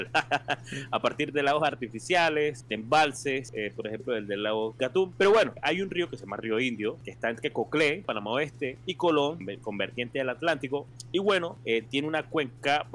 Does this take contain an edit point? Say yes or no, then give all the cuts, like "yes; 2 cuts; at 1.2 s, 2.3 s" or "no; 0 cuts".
yes; 9 cuts; at 2.7 s, 3.5 s, 4.8 s, 5.6 s, 7.1 s, 8.4 s, 9.5 s, 11.0 s, 11.5 s